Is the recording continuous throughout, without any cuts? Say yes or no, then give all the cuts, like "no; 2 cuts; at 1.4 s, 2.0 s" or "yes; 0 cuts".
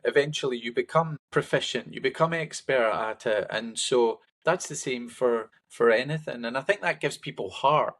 no; 3 cuts; at 1.2 s, 4.3 s, 5.6 s